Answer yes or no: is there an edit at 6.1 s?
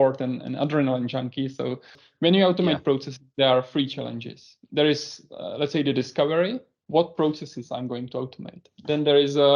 no